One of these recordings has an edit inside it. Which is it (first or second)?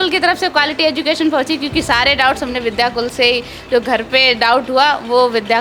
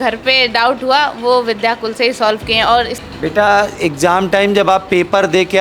second